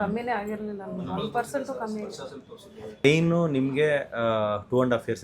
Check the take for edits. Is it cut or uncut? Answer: cut